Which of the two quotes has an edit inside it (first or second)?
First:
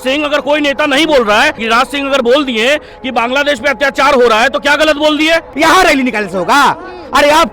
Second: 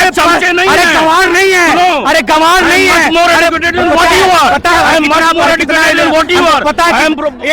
first